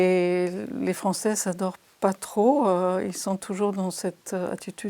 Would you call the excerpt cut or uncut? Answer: uncut